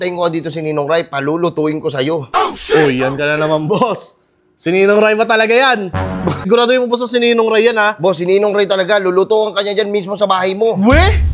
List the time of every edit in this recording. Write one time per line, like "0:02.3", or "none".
0:06.5